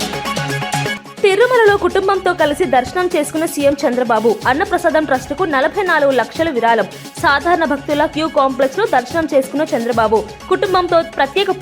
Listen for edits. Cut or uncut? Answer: cut